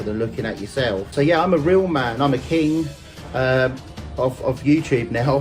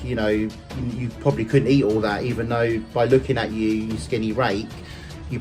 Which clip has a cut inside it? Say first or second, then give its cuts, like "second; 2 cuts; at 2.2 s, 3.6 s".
first; 1 cut; at 1.1 s